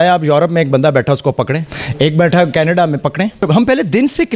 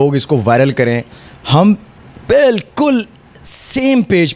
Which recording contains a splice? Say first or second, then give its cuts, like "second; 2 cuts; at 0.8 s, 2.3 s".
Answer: first; 2 cuts; at 1.8 s, 3.5 s